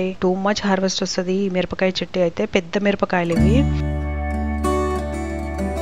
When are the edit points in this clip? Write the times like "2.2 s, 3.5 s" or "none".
none